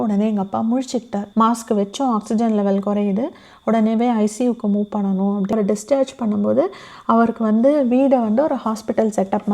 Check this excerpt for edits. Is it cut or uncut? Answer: cut